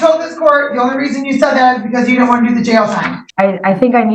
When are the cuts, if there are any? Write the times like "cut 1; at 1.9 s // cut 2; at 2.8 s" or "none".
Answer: cut 1; at 3.2 s